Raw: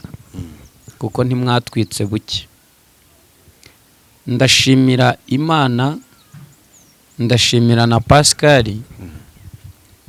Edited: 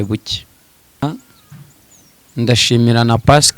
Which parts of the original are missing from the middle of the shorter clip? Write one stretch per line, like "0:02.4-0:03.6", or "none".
0:03.0-0:05.9